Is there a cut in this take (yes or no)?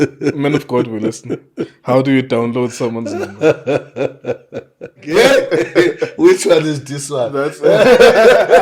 yes